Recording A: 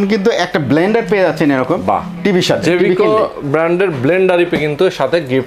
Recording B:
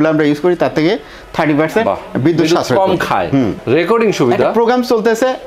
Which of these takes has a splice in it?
B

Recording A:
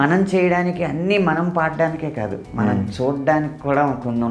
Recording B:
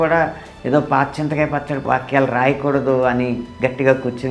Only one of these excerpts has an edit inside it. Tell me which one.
B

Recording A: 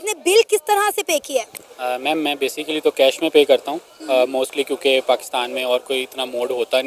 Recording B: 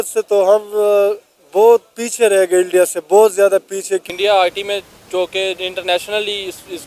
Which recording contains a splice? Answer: B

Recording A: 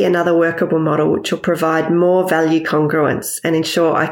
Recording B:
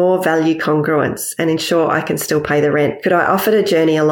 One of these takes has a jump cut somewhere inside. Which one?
B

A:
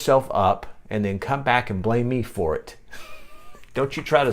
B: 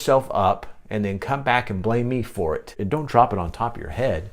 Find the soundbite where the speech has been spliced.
B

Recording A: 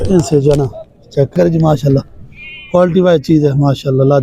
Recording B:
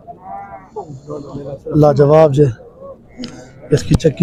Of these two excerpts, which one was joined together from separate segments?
A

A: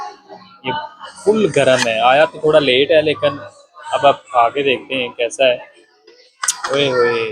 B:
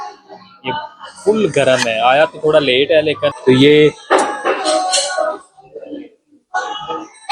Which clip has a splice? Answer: B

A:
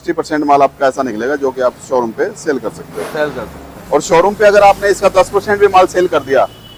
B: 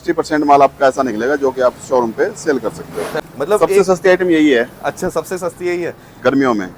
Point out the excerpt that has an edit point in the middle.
B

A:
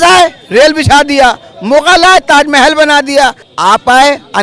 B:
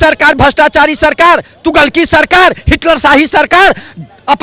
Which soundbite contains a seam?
A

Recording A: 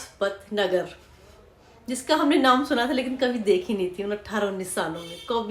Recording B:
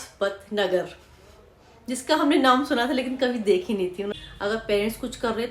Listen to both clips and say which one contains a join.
B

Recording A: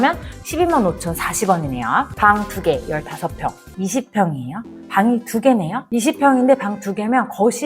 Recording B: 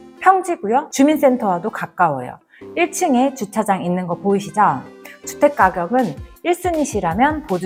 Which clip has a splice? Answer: A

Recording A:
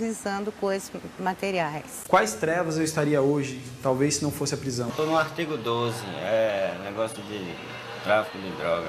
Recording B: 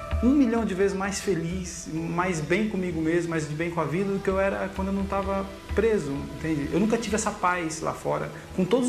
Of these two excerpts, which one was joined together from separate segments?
A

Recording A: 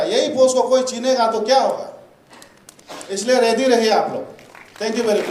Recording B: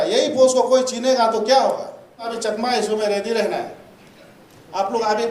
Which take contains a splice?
B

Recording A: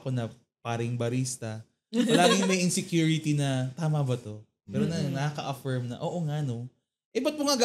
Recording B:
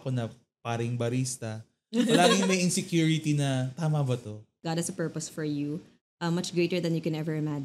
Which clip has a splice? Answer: B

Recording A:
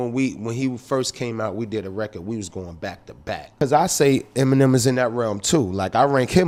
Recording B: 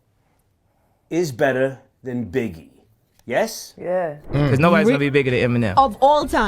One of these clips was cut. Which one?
B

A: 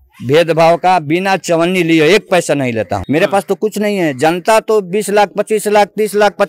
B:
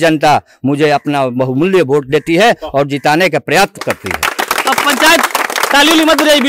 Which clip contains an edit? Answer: A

